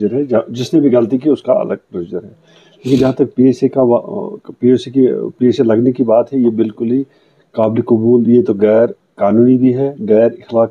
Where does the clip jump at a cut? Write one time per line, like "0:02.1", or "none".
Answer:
none